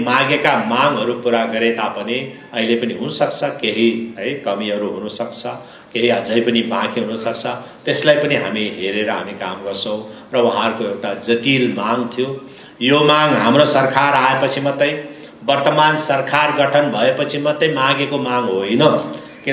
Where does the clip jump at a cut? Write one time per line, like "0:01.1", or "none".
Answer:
none